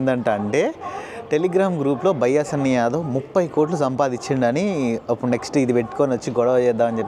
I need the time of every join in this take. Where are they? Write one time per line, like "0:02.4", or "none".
none